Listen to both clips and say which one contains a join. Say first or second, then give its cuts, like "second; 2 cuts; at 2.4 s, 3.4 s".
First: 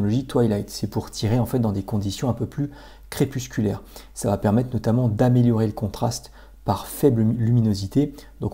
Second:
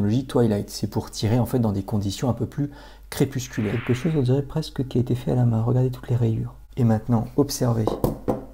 second; 2 cuts; at 3.8 s, 6.6 s